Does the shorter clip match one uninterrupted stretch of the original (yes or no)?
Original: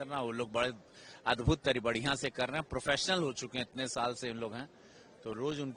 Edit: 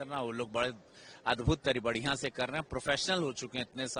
yes